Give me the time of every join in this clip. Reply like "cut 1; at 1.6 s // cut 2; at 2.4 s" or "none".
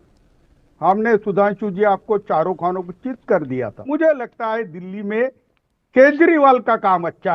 cut 1; at 3.8 s